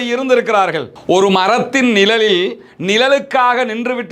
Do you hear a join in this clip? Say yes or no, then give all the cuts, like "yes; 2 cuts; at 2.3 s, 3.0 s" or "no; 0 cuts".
yes; 1 cut; at 1.0 s